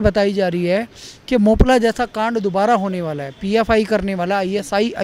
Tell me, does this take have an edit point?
no; 0 cuts

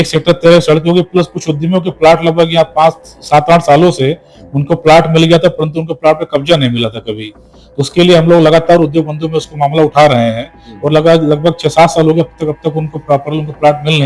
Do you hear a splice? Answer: no; 0 cuts

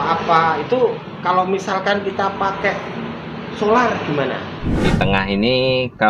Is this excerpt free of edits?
no; 1 cut; at 4.9 s

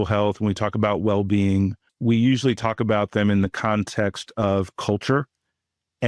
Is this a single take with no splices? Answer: no; 1 cut; at 1.9 s

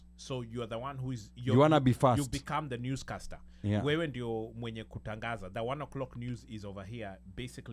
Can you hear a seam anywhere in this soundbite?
no; 0 cuts

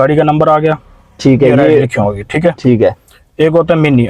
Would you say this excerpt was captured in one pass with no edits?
yes; 0 cuts

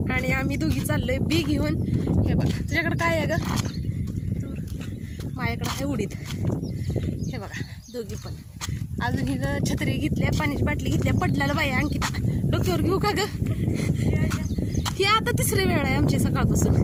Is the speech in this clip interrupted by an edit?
no; 0 cuts

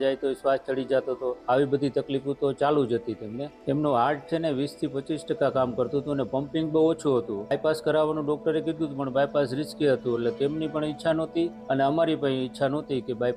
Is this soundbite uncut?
yes; 0 cuts

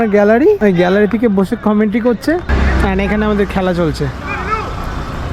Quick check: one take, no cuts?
yes; 0 cuts

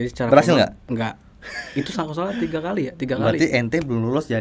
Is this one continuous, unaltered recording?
yes; 0 cuts

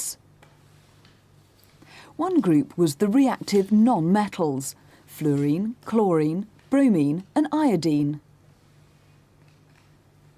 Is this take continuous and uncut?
no; 1 cut; at 6.8 s

